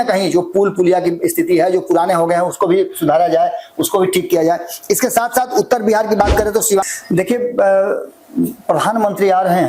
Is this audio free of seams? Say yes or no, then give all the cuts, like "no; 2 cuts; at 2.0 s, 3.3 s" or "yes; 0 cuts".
no; 1 cut; at 6.9 s